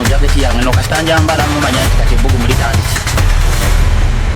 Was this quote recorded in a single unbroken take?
yes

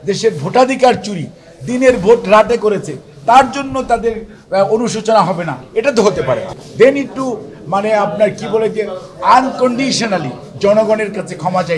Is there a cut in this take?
yes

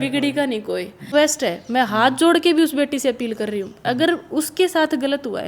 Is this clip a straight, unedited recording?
no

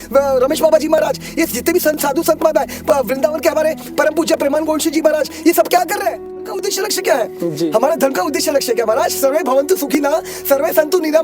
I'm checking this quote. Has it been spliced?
yes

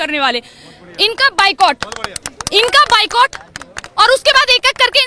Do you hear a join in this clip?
no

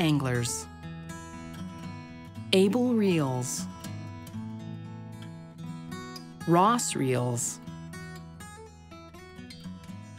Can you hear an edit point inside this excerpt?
yes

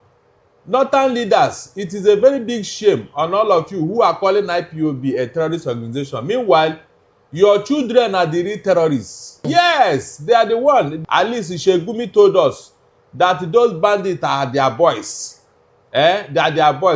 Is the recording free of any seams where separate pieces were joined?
no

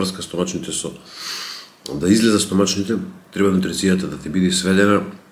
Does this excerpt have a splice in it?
no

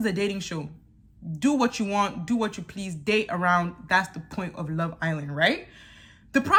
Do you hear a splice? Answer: no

